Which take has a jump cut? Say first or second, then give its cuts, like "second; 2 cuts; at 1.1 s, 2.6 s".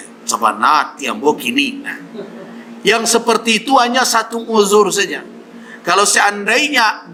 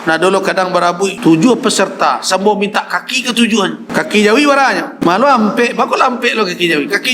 second; 3 cuts; at 1.2 s, 3.8 s, 4.9 s